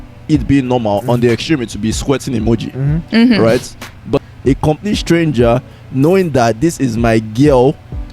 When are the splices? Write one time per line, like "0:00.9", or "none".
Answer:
0:04.2